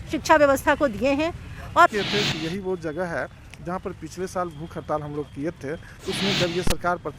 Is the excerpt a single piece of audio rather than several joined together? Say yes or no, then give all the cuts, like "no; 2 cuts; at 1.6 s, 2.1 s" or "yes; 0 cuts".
no; 1 cut; at 1.9 s